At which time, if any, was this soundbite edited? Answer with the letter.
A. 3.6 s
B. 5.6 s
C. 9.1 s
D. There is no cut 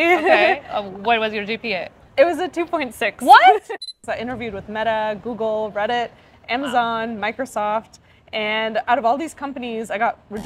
A